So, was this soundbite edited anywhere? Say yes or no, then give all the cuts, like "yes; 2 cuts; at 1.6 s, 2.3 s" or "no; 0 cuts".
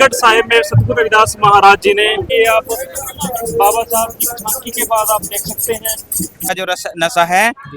yes; 2 cuts; at 2.3 s, 6.5 s